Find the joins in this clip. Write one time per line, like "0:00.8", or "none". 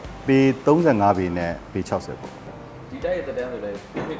0:02.5